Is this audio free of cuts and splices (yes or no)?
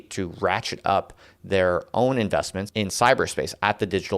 no